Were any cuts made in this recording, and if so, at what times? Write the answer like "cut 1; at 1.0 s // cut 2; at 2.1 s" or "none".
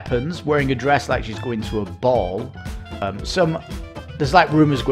cut 1; at 3.0 s

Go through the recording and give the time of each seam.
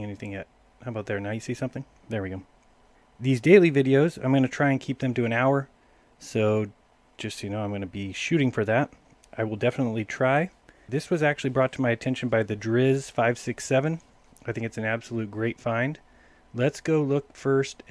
cut 1; at 14.9 s

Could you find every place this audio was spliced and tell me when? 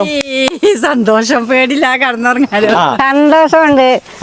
cut 1; at 3.0 s

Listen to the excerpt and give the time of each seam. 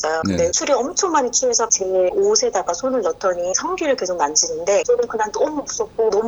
cut 1; at 1.7 s

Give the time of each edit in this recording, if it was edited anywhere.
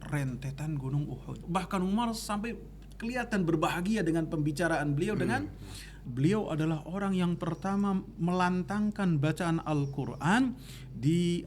cut 1; at 1.4 s // cut 2; at 6.0 s

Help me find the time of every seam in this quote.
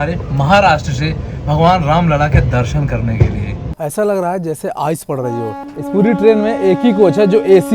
cut 1; at 3.6 s // cut 2; at 5.6 s

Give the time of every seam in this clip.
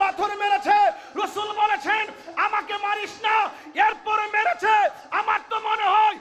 none

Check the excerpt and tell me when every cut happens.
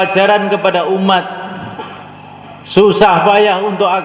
cut 1; at 2.6 s

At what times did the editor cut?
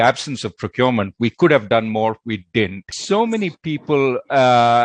cut 1; at 2.9 s

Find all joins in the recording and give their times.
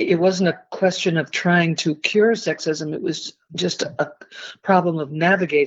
none

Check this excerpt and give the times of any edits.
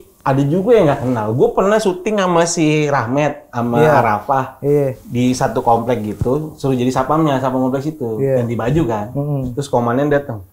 cut 1; at 5.0 s

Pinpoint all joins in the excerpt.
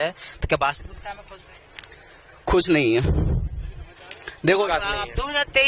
cut 1; at 4.6 s

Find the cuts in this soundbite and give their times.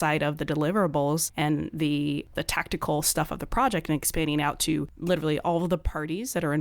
cut 1; at 1.3 s // cut 2; at 2.3 s // cut 3; at 4.9 s

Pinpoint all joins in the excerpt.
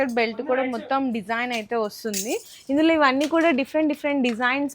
none

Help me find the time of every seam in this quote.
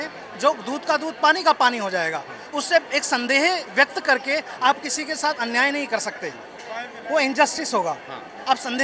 none

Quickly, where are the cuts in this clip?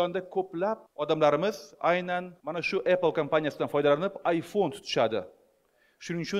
cut 1; at 0.9 s // cut 2; at 2.4 s

